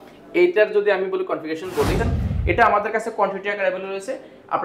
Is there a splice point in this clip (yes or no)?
yes